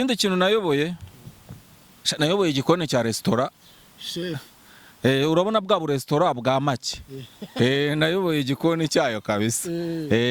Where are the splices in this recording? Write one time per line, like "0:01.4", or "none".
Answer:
none

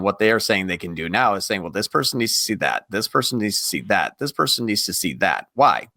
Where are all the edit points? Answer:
none

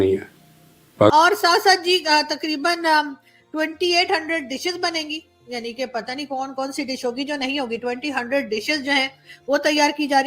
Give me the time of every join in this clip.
0:01.1

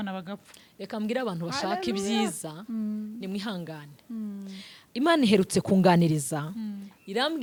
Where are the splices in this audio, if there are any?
none

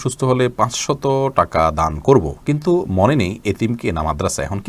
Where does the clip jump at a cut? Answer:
none

